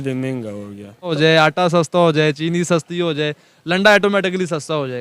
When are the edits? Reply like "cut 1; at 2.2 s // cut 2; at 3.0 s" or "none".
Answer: cut 1; at 1.1 s

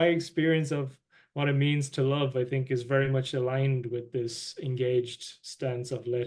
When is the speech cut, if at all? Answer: none

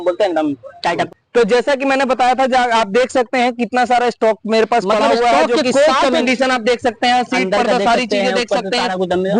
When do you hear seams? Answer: cut 1; at 1.1 s // cut 2; at 6.2 s

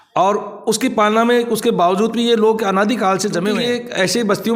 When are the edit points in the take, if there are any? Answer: cut 1; at 3.5 s

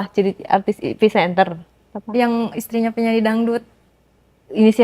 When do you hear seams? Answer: none

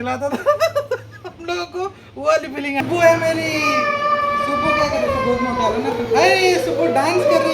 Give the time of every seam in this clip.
cut 1; at 2.8 s

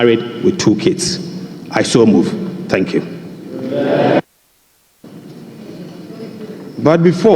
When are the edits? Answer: cut 1; at 5.0 s

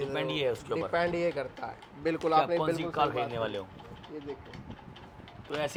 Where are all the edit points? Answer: none

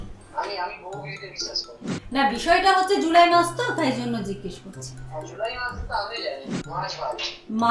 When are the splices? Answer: cut 1; at 1.8 s // cut 2; at 6.4 s

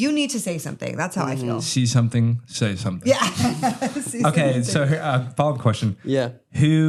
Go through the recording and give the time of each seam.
none

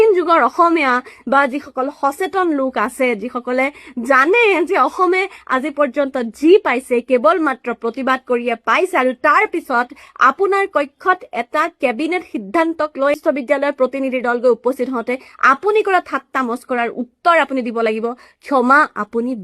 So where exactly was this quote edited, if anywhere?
none

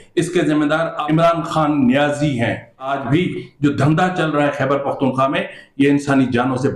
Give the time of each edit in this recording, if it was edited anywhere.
cut 1; at 1.0 s // cut 2; at 2.9 s

